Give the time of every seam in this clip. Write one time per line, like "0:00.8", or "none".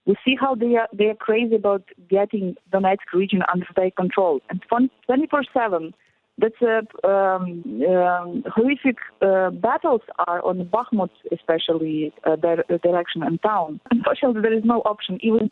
0:13.9

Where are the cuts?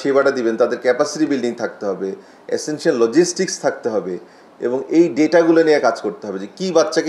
none

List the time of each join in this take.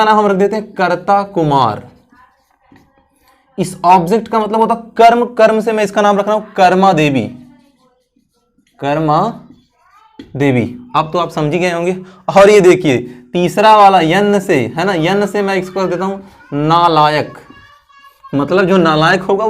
none

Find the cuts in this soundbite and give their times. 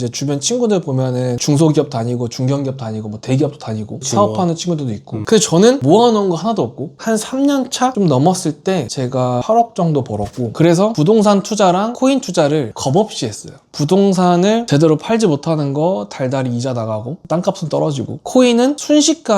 0:07.0
0:10.4

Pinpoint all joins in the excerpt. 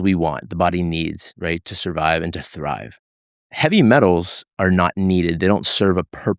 none

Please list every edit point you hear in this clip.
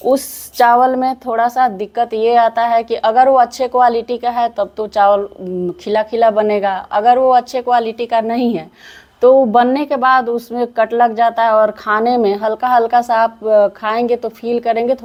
none

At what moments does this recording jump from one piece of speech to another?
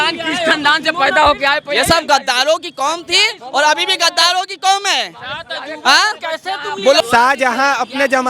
0:07.0

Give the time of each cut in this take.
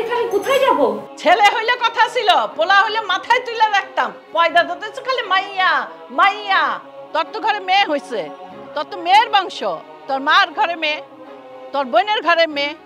0:01.1
0:06.8

